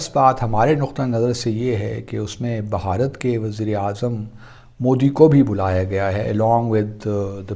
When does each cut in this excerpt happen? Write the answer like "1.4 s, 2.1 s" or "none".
none